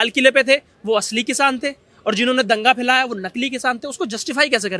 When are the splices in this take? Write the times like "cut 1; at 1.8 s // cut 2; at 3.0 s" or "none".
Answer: none

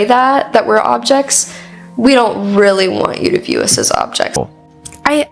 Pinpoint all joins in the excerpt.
cut 1; at 4.3 s

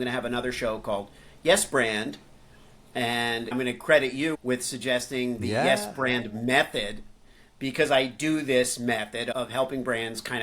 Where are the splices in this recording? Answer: cut 1; at 3.5 s // cut 2; at 9.3 s

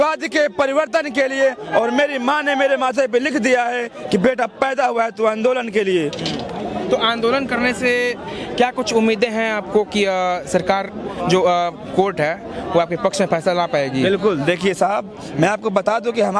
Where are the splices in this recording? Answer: none

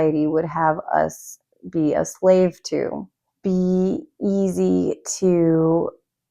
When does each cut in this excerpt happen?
cut 1; at 3.1 s

